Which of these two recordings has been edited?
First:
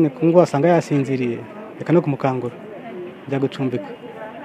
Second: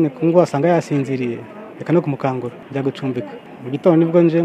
second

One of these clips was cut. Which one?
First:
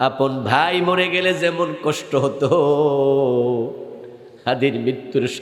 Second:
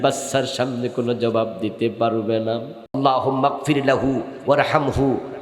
second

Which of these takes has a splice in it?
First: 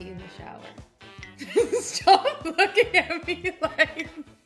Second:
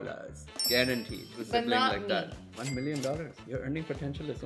second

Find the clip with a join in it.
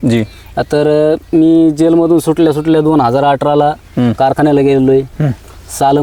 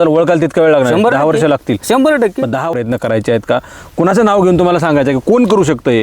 second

